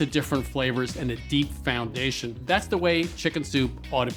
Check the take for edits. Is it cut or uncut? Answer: cut